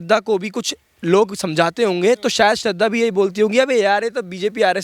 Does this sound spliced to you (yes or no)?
no